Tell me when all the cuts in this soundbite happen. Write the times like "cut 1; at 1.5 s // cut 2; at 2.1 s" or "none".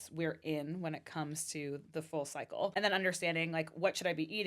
cut 1; at 2.7 s